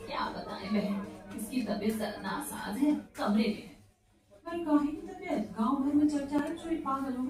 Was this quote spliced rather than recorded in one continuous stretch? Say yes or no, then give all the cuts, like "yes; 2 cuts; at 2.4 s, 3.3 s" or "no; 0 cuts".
no; 0 cuts